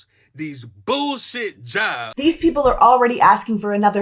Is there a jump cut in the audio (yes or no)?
yes